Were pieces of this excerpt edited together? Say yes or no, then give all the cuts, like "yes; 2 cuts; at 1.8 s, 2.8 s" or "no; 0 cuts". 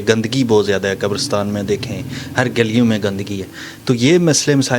no; 0 cuts